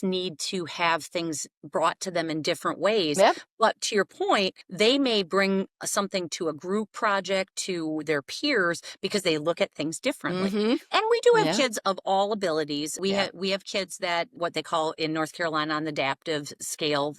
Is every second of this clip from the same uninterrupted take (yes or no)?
no